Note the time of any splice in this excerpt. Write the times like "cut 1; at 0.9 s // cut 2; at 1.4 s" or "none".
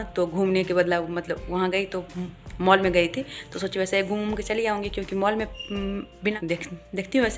cut 1; at 6.3 s

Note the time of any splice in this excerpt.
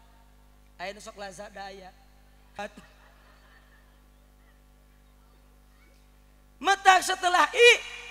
cut 1; at 2.6 s

